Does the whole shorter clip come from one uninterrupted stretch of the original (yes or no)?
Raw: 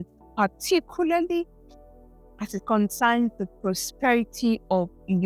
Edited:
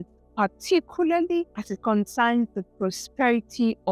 no